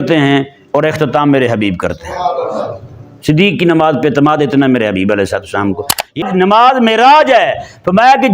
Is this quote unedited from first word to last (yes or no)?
no